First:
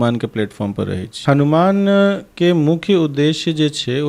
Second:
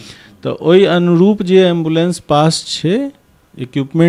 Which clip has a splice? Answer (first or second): first